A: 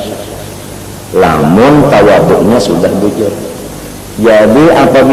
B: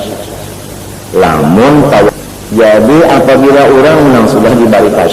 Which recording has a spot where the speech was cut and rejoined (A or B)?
B